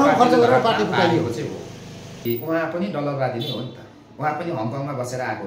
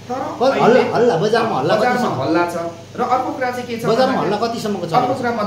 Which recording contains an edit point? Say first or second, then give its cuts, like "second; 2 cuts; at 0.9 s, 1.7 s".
first; 1 cut; at 2.3 s